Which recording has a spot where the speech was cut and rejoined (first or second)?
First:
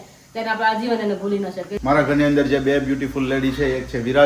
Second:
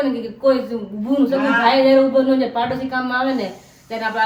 first